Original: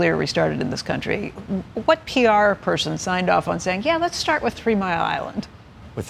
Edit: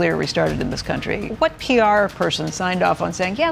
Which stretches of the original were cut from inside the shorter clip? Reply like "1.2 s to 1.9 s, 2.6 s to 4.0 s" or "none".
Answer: 1.3 s to 1.7 s

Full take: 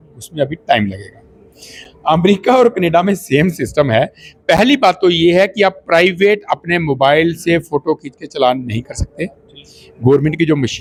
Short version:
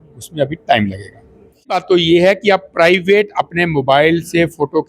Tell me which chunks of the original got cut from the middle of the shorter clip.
1.8 s to 4.9 s

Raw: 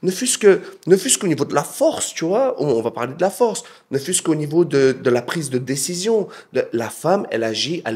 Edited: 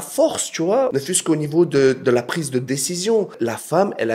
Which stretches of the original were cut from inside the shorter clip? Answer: 2.5 s to 3.9 s, 6.4 s to 6.7 s

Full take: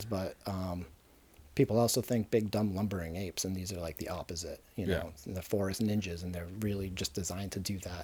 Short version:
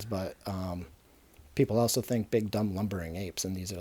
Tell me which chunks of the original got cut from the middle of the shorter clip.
none

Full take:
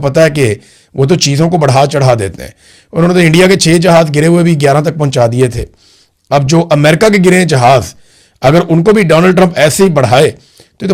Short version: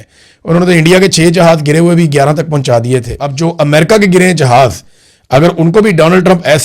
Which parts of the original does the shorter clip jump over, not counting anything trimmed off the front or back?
5.7 s to 6.3 s

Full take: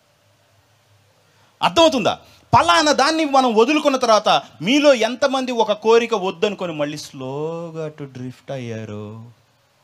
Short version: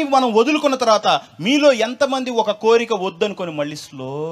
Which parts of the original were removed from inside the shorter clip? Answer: none

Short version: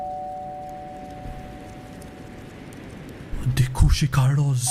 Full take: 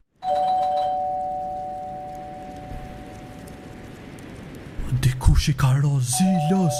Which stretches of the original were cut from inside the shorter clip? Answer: none

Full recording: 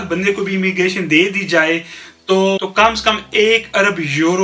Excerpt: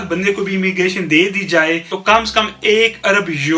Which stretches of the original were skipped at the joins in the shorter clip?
2.0 s to 2.7 s

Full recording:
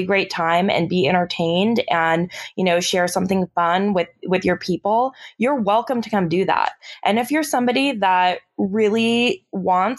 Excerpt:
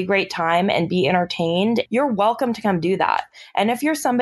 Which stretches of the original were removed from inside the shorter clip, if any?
1.9 s to 5.3 s

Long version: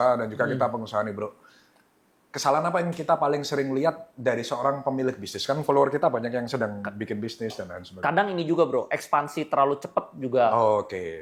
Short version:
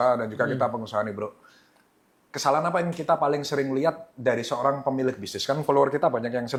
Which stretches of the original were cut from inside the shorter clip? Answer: none

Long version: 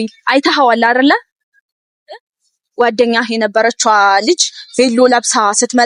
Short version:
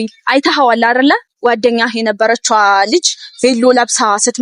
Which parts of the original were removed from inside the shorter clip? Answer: 1.3 s to 2.6 s

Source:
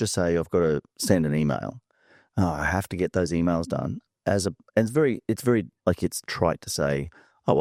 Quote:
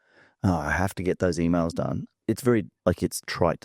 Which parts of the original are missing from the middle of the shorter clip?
4.1 s to 5.2 s

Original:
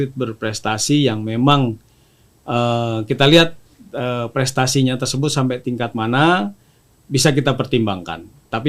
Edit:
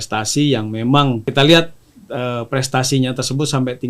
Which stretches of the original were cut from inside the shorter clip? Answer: 1.8 s to 3.1 s

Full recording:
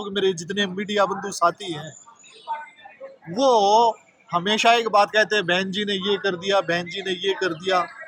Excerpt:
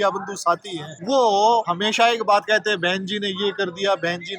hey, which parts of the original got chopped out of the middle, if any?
1.9 s to 3.2 s, 4.0 s to 4.4 s

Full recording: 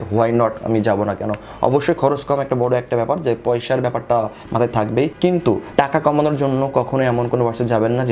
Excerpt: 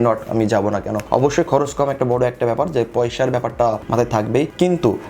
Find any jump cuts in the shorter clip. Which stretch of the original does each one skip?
1.3 s to 1.5 s, 4.3 s to 4.5 s

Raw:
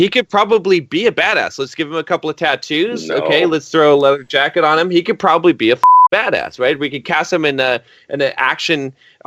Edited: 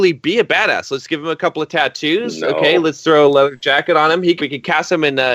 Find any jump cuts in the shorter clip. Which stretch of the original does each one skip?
5.1 s to 6.9 s

